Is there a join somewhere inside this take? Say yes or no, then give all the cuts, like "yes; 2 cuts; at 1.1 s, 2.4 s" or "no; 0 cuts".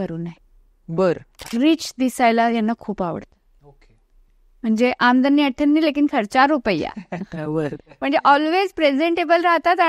yes; 1 cut; at 1.3 s